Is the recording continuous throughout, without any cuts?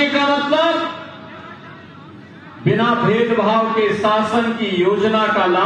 yes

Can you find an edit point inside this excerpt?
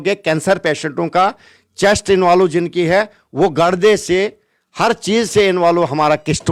no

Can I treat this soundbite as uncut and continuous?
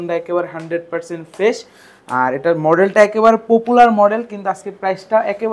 yes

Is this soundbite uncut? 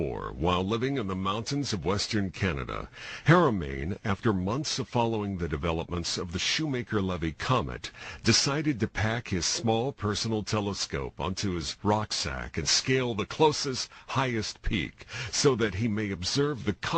no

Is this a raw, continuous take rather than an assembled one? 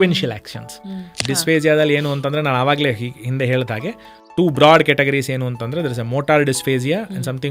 no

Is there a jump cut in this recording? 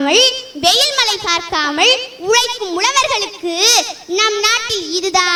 no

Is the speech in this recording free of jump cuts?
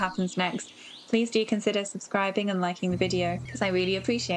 no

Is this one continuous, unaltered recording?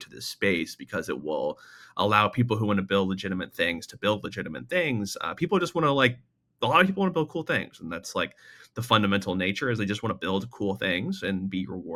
yes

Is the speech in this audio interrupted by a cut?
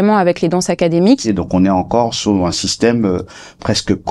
yes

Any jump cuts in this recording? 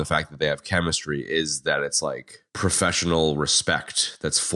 no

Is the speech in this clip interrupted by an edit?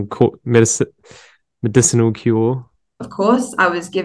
yes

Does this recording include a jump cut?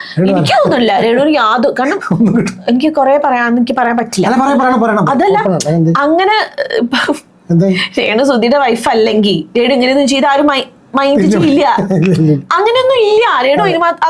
no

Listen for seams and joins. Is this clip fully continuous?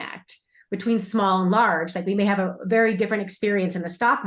yes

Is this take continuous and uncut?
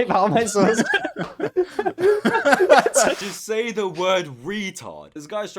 no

